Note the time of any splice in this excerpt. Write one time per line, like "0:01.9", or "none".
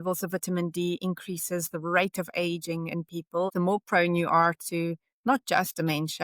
0:03.5